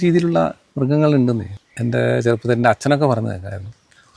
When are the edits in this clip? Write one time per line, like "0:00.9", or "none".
0:01.5